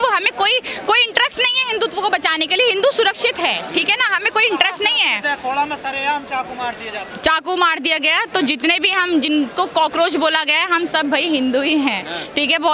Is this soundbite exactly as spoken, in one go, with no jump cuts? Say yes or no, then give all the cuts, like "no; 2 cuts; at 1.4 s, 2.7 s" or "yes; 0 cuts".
yes; 0 cuts